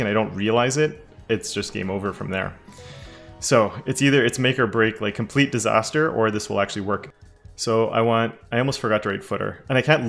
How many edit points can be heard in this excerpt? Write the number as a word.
one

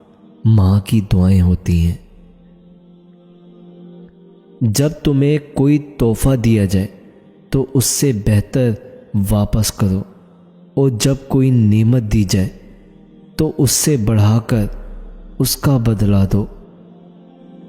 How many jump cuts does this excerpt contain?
one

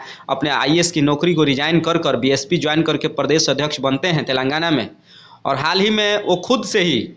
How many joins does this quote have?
zero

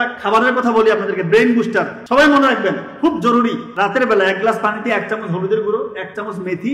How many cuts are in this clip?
two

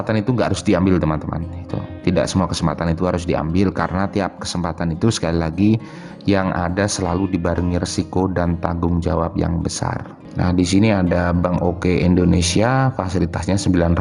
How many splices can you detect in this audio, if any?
one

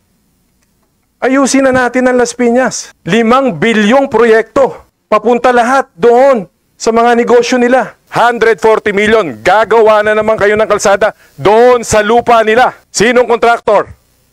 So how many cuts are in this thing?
four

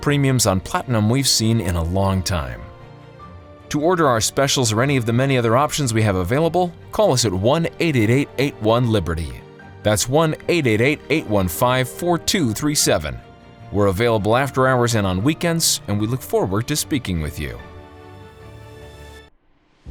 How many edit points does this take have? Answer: zero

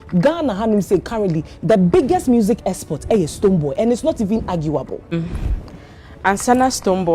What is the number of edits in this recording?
one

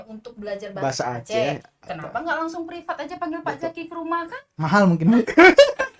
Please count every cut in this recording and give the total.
zero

